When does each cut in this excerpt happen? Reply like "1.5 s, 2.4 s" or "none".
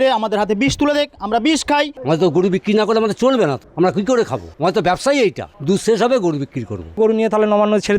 1.9 s, 3.6 s, 4.4 s, 5.5 s, 7.0 s